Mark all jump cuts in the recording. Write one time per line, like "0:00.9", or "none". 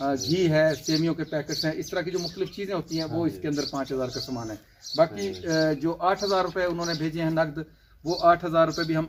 none